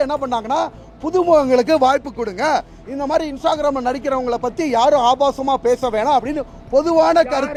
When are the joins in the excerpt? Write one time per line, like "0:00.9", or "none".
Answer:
none